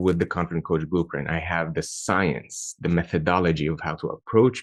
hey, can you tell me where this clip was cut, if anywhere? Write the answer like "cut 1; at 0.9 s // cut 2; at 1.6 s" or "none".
none

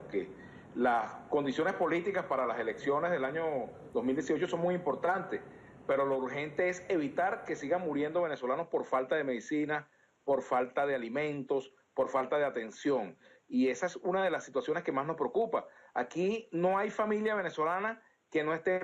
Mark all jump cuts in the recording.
cut 1; at 9.0 s

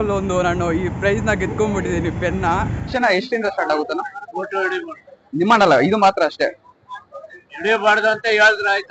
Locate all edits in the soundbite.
cut 1; at 2.9 s

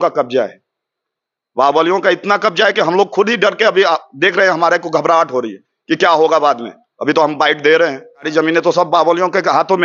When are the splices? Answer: cut 1; at 8.3 s

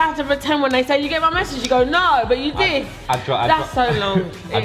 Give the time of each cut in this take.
none

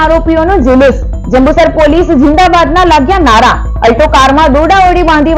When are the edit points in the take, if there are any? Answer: none

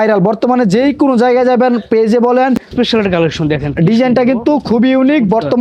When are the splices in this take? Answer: cut 1; at 2.7 s

